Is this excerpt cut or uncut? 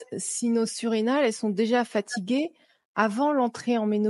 uncut